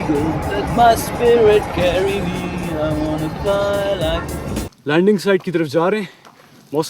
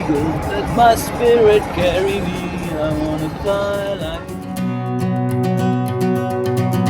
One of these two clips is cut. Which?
first; 1 cut; at 4.4 s

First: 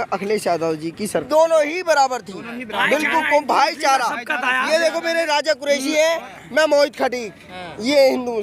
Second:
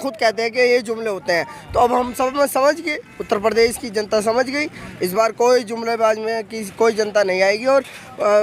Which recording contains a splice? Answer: first; 1 cut; at 1.2 s

